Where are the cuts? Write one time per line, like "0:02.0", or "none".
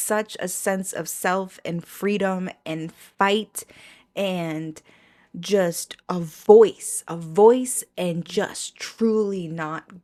none

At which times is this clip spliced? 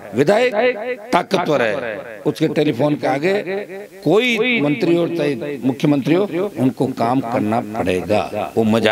none

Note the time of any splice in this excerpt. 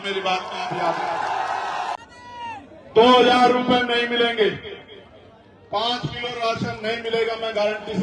0:02.0

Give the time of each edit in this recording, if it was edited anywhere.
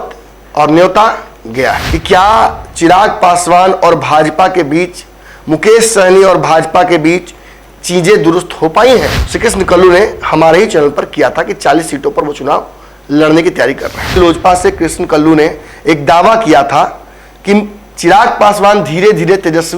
0:01.9
0:09.2
0:14.2

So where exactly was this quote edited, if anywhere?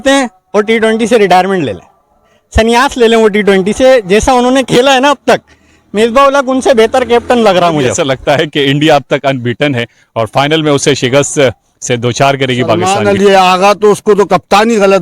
0:08.0
0:12.8

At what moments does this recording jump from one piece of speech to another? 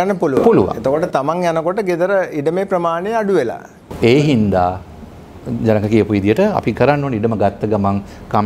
none

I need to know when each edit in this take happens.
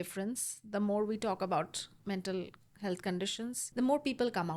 0:01.9
0:03.6

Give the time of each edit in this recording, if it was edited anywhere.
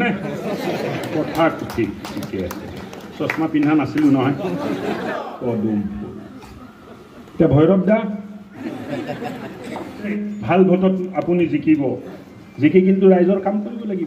0:05.1
0:08.6
0:10.1

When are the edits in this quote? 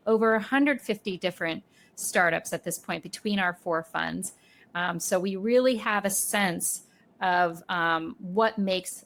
none

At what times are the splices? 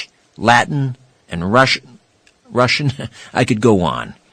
0:03.1

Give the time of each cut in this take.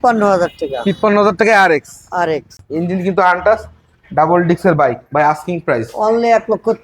0:02.6

